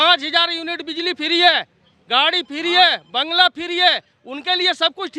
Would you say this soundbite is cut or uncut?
uncut